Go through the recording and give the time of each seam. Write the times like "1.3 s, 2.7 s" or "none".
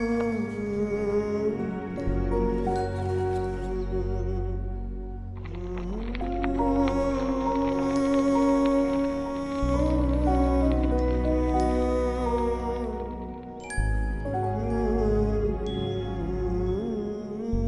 none